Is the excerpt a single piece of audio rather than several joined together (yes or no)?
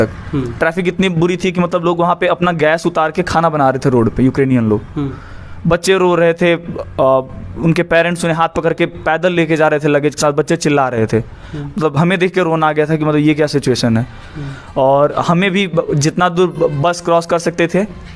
yes